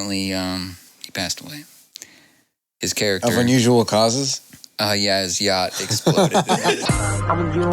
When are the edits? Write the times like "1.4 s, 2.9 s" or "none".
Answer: 0.9 s, 6.8 s